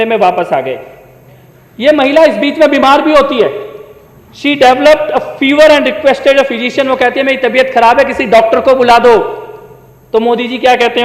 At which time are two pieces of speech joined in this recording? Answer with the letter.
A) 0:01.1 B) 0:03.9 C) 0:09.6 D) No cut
D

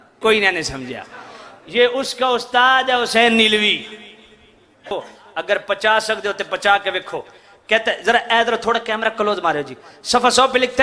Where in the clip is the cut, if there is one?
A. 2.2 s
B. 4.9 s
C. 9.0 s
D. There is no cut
B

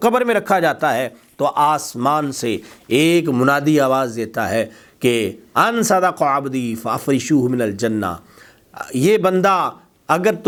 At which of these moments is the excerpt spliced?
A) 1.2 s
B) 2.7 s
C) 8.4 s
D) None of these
D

